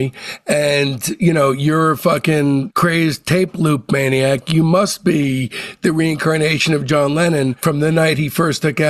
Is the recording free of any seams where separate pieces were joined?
yes; 0 cuts

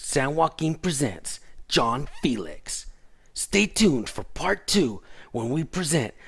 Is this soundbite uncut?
yes; 0 cuts

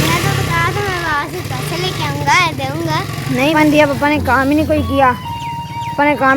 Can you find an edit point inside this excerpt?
yes; 1 cut; at 3.5 s

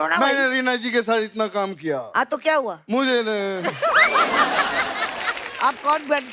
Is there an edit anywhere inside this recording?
yes; 1 cut; at 5.4 s

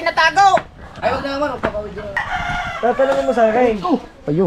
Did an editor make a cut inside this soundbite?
yes; 1 cut; at 2.2 s

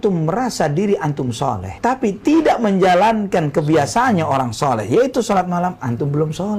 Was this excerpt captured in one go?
yes; 0 cuts

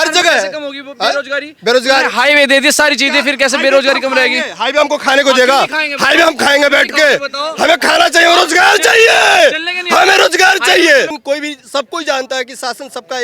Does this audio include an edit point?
yes; 1 cut; at 11.2 s

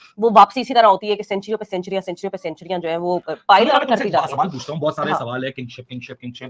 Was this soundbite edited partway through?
no; 0 cuts

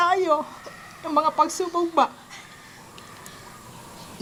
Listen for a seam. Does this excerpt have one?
no; 0 cuts

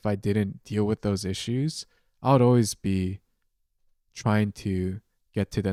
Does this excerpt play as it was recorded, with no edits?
yes; 0 cuts

